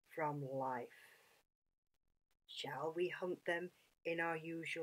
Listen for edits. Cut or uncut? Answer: uncut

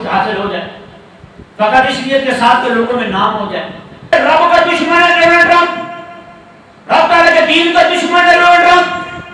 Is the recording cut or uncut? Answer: cut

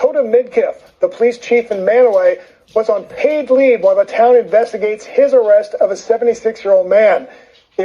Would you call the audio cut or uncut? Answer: uncut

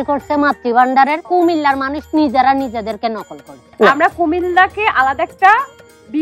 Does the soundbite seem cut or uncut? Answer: cut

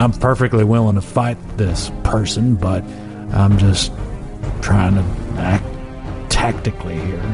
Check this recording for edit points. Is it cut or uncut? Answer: uncut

